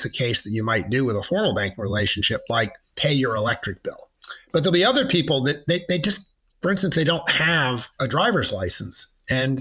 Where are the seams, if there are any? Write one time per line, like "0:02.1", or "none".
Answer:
0:02.8
0:07.9